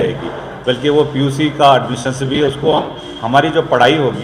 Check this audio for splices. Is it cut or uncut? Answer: uncut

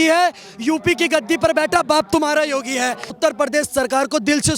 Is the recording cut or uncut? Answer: cut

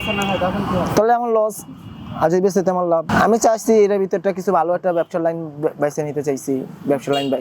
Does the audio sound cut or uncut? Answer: cut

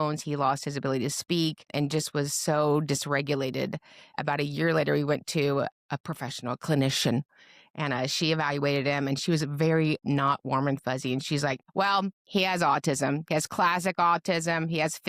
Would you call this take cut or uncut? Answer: cut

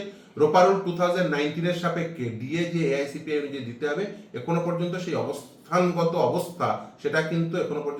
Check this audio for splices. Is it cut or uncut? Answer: uncut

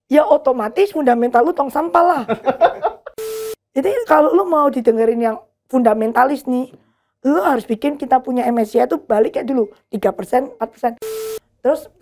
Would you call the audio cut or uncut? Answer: cut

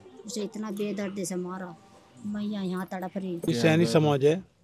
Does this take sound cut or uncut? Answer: cut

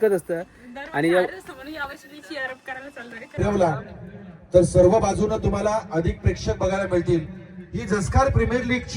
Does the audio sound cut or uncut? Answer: cut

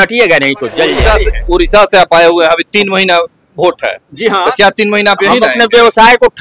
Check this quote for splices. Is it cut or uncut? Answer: cut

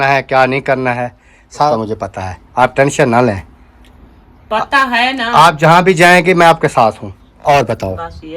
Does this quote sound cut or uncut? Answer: cut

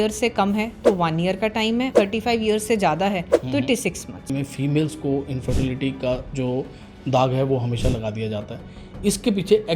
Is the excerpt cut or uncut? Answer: cut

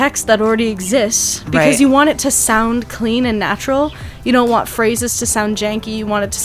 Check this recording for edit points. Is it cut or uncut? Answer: uncut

